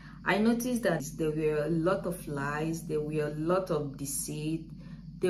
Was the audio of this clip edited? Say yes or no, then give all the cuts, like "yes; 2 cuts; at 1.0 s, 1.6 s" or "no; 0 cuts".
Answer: yes; 1 cut; at 1.0 s